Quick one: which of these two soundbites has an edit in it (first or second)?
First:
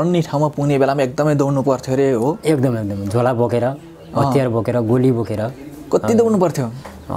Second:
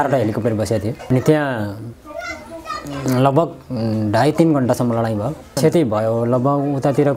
second